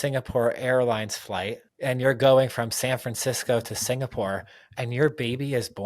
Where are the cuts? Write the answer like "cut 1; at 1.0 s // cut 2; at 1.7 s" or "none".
cut 1; at 1.6 s